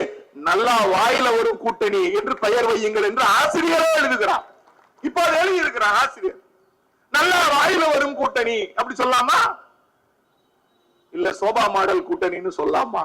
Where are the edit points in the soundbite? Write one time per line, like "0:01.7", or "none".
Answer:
none